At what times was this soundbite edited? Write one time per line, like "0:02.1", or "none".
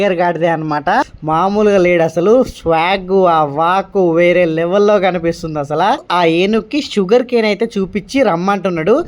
0:01.2
0:06.0